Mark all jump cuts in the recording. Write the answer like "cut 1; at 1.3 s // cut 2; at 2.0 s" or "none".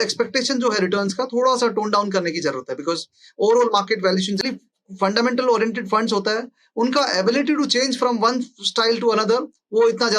cut 1; at 4.5 s